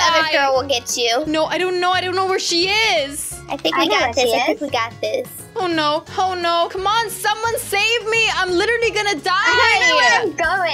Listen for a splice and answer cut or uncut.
uncut